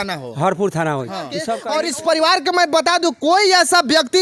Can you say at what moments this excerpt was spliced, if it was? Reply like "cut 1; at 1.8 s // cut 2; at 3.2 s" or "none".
cut 1; at 1.5 s